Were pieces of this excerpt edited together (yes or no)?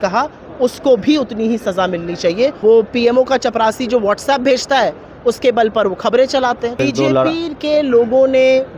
yes